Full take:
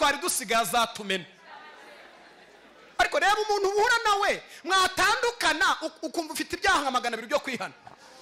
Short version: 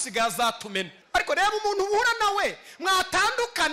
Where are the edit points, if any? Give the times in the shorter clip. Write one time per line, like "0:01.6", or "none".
0:01.0